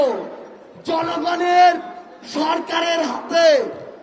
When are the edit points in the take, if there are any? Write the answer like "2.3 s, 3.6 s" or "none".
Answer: none